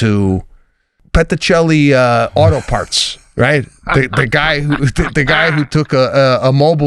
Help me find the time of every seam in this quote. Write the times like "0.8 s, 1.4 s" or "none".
1.0 s